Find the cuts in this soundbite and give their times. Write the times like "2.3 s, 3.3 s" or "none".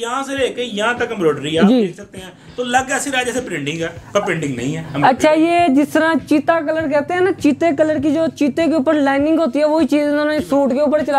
none